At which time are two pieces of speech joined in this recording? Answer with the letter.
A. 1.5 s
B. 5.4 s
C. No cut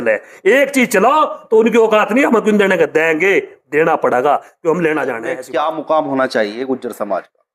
B